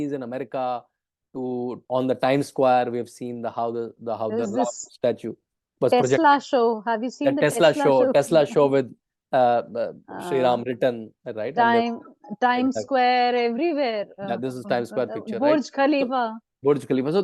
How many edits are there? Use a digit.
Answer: 1